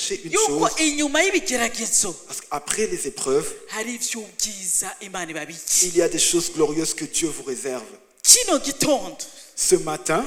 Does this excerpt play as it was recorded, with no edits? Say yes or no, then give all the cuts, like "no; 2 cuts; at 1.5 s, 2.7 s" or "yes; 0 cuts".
yes; 0 cuts